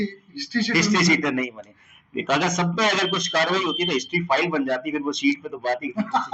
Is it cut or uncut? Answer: uncut